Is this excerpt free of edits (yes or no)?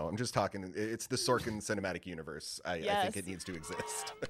yes